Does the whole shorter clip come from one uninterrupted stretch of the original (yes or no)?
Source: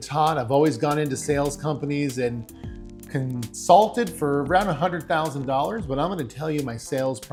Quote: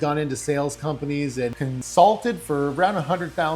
no